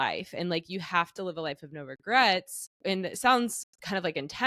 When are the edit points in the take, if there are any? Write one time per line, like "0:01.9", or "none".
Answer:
0:02.7